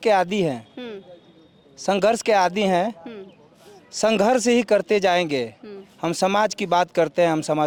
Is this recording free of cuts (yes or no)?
yes